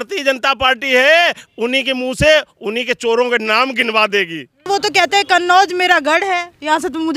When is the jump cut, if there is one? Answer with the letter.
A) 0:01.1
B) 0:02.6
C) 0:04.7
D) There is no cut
C